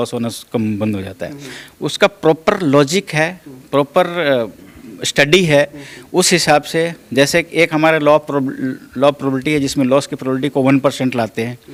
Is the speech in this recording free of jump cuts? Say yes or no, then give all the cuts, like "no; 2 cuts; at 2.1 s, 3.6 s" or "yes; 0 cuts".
yes; 0 cuts